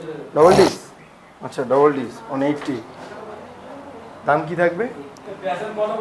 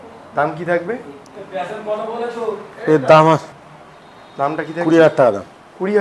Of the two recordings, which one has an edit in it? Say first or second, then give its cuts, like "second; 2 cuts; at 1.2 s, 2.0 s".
first; 1 cut; at 2.9 s